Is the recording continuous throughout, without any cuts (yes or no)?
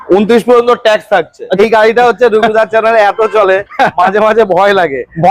no